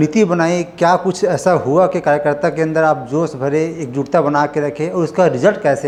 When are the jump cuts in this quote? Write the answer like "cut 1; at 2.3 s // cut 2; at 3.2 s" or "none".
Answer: none

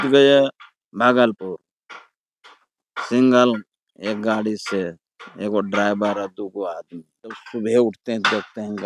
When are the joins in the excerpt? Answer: cut 1; at 7.4 s

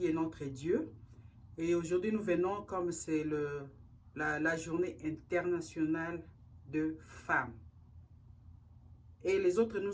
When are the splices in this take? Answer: none

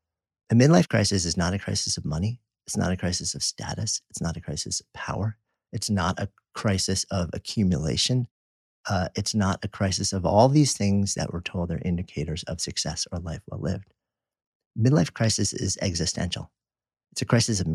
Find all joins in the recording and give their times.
none

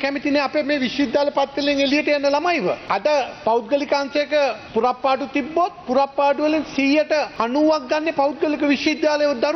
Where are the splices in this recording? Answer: cut 1; at 2.8 s // cut 2; at 4.6 s // cut 3; at 7.3 s

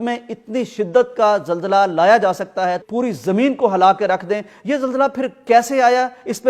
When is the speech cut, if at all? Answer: cut 1; at 2.8 s

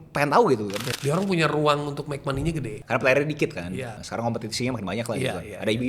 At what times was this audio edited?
cut 1; at 0.9 s // cut 2; at 2.8 s // cut 3; at 4.0 s

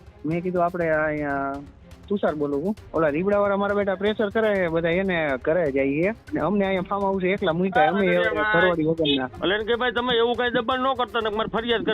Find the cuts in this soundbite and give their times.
cut 1; at 2.8 s // cut 2; at 6.2 s // cut 3; at 9.3 s

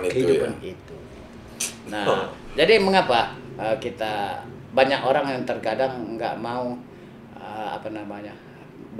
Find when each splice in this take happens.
none

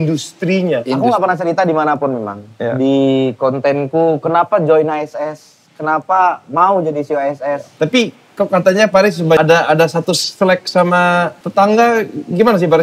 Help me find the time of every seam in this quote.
cut 1; at 1.0 s // cut 2; at 7.7 s // cut 3; at 9.4 s // cut 4; at 11.4 s

